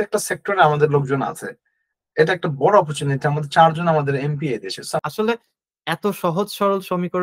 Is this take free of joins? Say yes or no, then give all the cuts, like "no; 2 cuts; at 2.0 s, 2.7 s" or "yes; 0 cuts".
no; 1 cut; at 5.0 s